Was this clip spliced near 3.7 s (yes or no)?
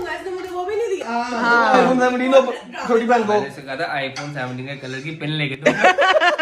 no